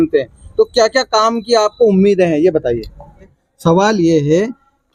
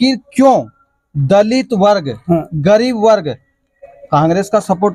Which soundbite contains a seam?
first; 1 cut; at 3.3 s

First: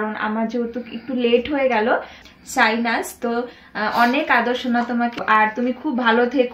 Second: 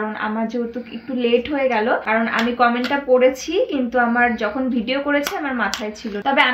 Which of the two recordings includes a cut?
first; 2 cuts; at 2.0 s, 5.2 s

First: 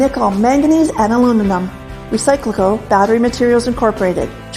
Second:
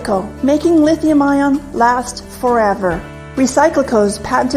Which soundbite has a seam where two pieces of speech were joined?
second; 1 cut; at 2.1 s

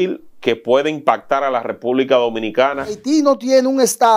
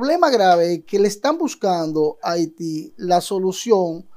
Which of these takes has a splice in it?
first; 1 cut; at 3.0 s

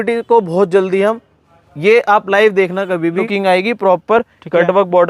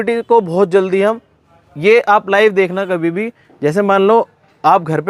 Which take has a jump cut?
first; 1 cut; at 3.3 s

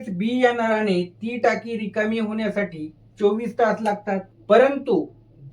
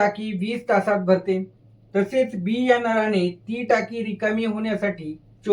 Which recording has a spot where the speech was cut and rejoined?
first; 1 cut; at 4.3 s

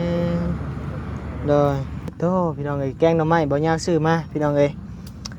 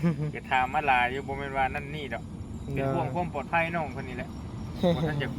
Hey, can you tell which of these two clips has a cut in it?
first; 1 cut; at 2.1 s

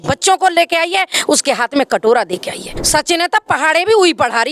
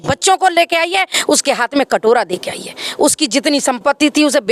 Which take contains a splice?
first; 1 cut; at 2.8 s

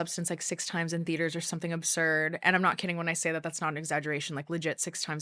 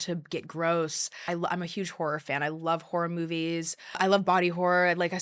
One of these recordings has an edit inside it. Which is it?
second; 2 cuts; at 1.2 s, 4.0 s

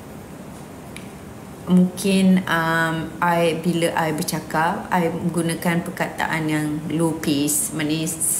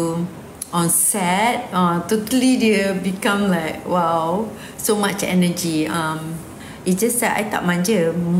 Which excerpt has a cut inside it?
second; 1 cut; at 6.7 s

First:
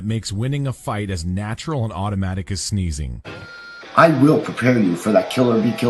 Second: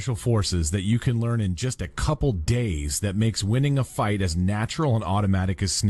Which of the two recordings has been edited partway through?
first; 1 cut; at 4.0 s

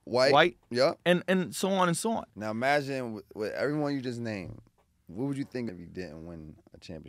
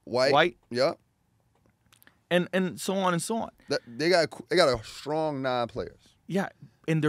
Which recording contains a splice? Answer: first; 3 cuts; at 1.0 s, 2.3 s, 5.7 s

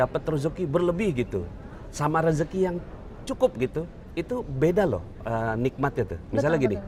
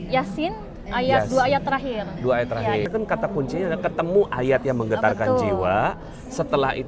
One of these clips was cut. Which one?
second; 1 cut; at 2.9 s

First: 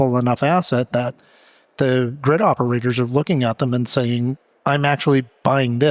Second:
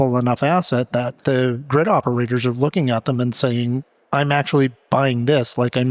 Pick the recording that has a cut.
second; 1 cut; at 1.1 s

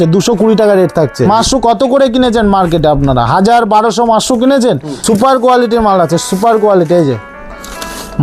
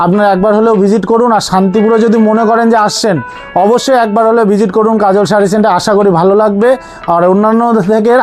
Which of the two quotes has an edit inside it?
first; 2 cuts; at 1.2 s, 4.9 s

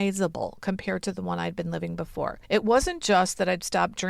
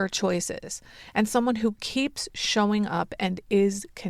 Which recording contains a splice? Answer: first; 1 cut; at 2.4 s

